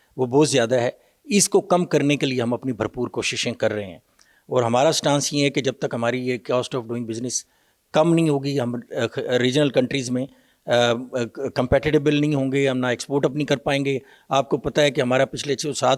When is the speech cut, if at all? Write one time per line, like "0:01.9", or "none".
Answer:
none